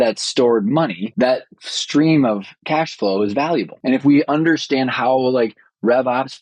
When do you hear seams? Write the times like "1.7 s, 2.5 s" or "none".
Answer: 1.0 s, 2.5 s, 3.7 s